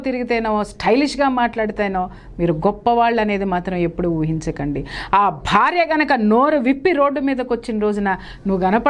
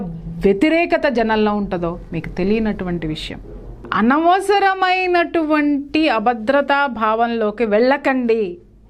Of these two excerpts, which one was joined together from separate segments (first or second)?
second